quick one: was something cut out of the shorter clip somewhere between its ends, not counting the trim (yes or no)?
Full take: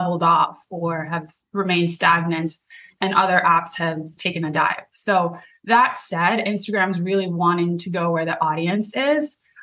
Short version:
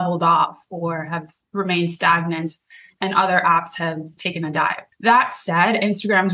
yes